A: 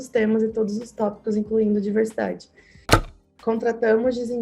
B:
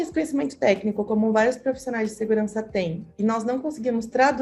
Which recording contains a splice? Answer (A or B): A